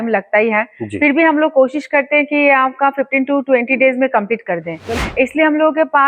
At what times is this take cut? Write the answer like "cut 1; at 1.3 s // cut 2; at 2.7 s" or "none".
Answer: cut 1; at 4.9 s